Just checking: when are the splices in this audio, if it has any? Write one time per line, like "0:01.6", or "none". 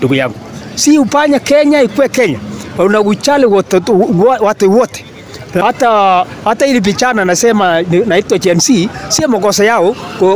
0:05.6